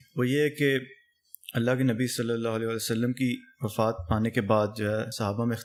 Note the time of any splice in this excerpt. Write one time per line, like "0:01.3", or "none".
none